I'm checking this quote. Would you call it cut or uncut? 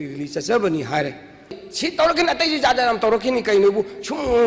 cut